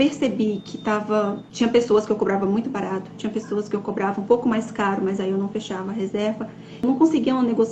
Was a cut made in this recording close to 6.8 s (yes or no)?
yes